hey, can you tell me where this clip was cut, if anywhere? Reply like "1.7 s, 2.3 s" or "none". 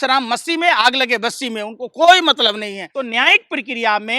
2.8 s